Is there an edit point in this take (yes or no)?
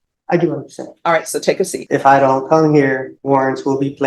yes